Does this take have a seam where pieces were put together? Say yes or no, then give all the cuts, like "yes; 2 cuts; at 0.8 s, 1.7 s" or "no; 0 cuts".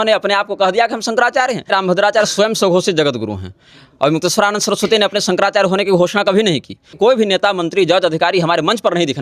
yes; 2 cuts; at 1.7 s, 6.9 s